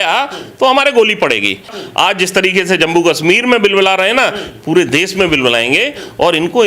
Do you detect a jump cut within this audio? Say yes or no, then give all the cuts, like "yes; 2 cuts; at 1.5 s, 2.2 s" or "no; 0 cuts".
yes; 1 cut; at 1.8 s